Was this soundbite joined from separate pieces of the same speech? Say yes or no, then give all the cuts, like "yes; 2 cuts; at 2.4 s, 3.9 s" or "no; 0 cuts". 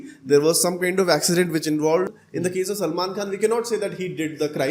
yes; 1 cut; at 2.2 s